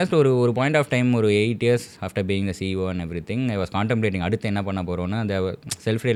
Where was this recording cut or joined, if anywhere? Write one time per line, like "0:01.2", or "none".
none